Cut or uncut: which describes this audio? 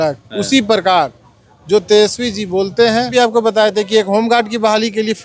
cut